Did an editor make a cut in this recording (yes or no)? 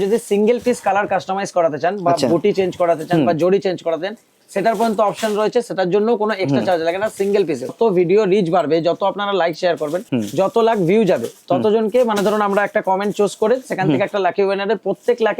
yes